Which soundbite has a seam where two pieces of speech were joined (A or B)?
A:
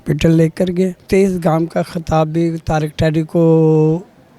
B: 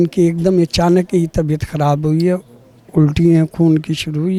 A